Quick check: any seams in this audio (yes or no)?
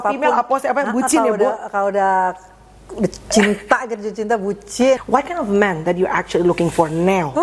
yes